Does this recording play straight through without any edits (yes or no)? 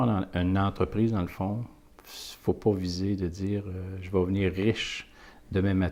yes